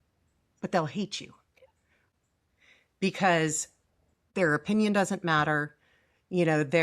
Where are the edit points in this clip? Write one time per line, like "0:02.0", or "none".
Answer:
0:02.0
0:04.2